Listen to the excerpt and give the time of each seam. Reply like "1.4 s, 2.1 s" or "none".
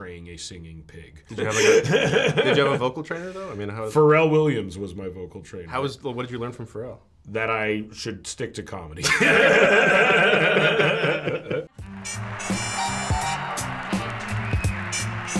11.8 s

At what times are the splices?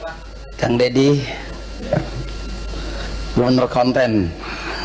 none

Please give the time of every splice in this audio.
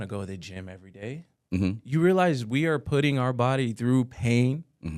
none

